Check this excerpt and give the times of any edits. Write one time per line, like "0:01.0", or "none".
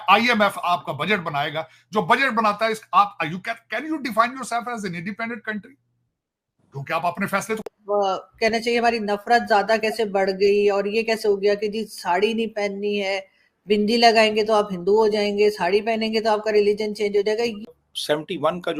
0:07.6
0:17.7